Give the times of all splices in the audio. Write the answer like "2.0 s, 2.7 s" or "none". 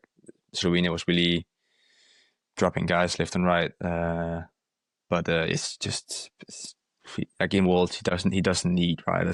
none